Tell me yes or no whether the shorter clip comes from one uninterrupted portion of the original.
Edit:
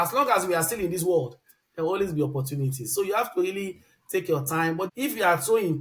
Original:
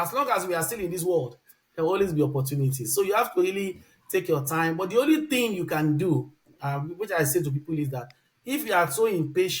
no